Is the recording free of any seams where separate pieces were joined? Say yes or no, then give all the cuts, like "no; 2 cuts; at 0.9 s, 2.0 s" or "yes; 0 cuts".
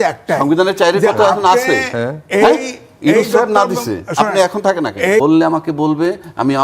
no; 1 cut; at 5.2 s